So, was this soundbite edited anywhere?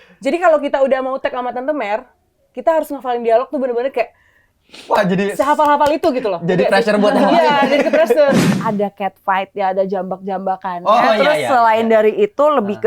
yes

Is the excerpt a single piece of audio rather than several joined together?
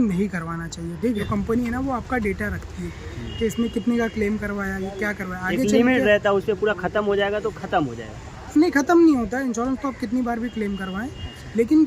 no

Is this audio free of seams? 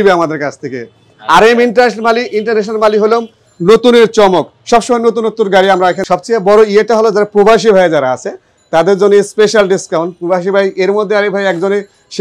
no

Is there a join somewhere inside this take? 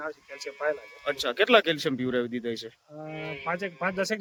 no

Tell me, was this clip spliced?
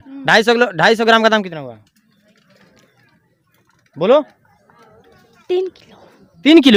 no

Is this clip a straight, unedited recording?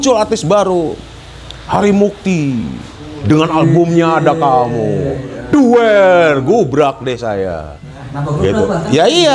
yes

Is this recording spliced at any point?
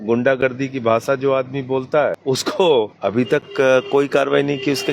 yes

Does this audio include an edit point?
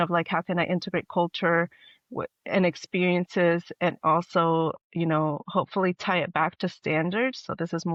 no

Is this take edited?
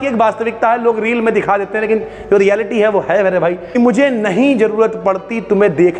yes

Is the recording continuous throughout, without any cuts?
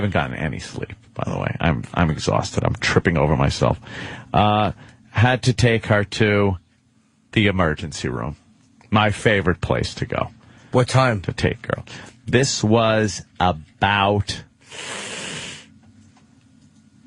yes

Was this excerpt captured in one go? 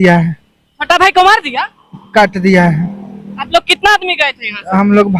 yes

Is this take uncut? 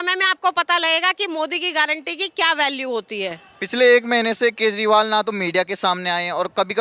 yes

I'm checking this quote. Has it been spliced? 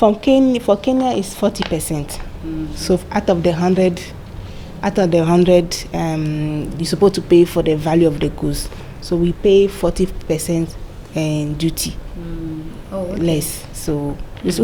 no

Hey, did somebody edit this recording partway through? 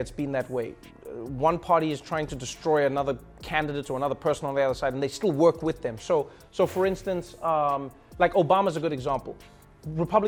no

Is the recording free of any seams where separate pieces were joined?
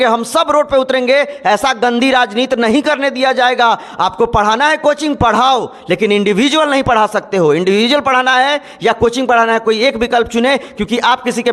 yes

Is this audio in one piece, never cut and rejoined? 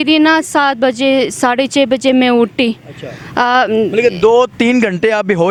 yes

